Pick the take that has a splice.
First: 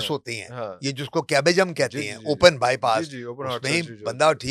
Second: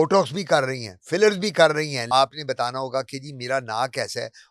second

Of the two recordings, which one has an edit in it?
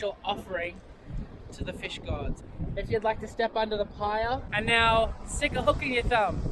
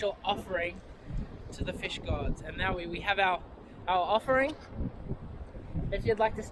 first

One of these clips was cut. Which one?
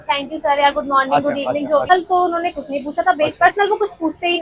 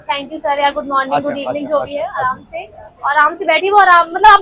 first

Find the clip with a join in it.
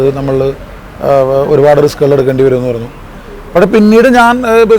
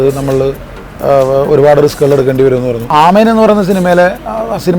second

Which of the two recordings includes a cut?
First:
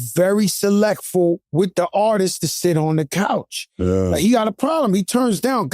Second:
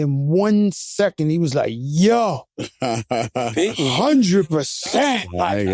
first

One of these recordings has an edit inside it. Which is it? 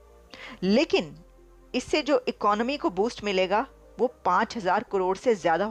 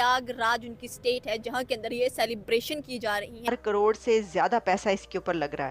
second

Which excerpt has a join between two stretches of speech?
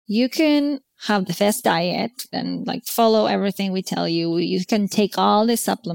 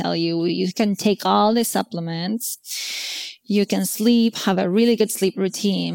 first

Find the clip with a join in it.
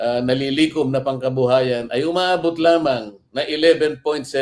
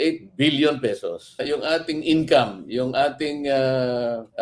second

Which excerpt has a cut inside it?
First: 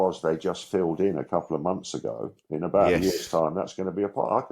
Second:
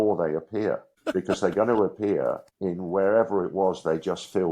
second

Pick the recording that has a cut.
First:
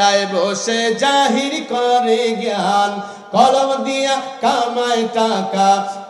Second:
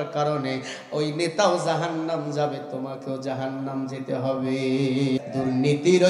second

